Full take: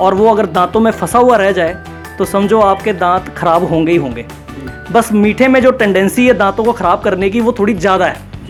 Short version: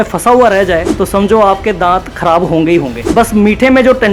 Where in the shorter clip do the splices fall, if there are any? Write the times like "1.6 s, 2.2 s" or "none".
0.9 s, 3.0 s